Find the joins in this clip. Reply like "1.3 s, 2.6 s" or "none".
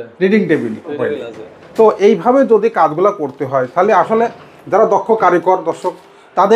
1.0 s